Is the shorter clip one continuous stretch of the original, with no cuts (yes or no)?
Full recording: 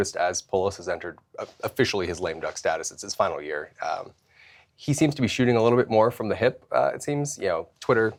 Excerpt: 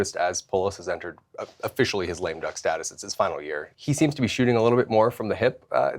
no